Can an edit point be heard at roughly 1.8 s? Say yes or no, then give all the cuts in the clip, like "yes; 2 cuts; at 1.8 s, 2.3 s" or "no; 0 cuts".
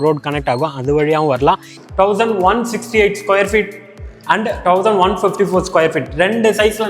yes; 1 cut; at 1.8 s